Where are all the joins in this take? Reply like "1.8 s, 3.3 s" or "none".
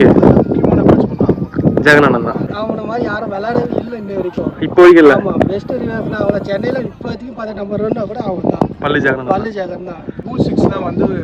2.5 s, 10.3 s